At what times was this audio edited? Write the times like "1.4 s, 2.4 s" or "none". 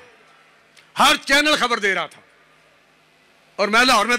none

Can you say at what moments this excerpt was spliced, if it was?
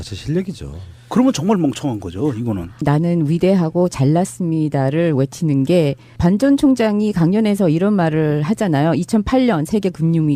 6.0 s

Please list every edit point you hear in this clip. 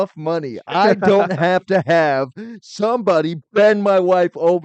none

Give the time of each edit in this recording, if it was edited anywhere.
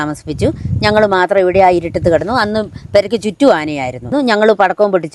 4.1 s

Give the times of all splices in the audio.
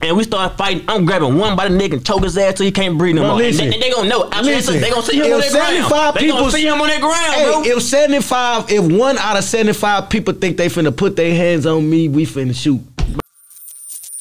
13.1 s

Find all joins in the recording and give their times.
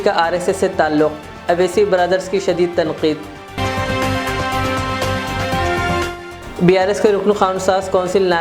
none

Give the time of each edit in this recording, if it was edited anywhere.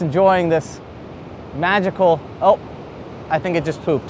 none

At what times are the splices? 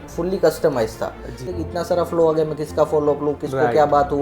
1.5 s

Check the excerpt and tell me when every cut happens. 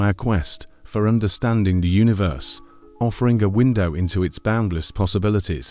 none

